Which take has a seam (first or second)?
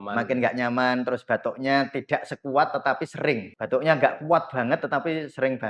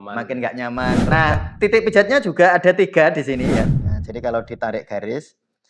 second